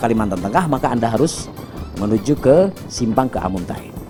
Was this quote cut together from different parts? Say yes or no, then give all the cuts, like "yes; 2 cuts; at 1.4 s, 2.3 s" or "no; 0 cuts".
no; 0 cuts